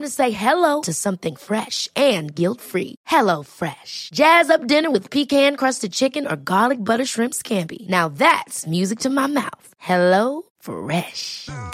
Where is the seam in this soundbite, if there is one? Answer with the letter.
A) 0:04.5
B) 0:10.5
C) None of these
C